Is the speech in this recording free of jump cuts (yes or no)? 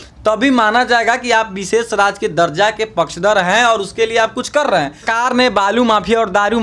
no